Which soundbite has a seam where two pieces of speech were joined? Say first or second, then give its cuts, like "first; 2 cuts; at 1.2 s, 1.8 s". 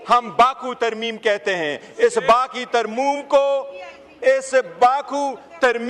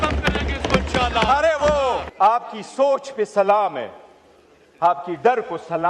second; 1 cut; at 2.0 s